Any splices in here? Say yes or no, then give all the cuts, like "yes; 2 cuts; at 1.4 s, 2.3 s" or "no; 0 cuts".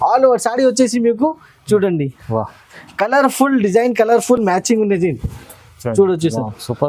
no; 0 cuts